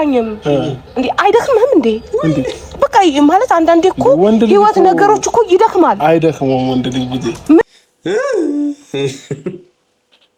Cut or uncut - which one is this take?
uncut